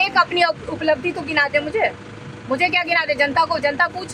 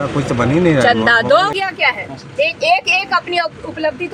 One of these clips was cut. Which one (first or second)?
second